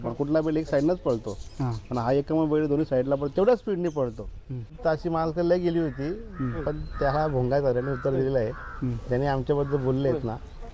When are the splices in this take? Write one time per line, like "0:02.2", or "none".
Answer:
0:04.8